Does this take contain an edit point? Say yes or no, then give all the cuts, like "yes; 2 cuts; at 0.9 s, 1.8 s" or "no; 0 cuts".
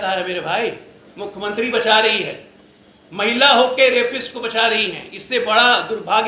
no; 0 cuts